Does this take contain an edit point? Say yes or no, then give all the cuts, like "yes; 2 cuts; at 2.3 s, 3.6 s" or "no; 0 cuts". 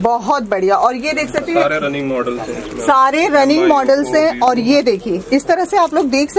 no; 0 cuts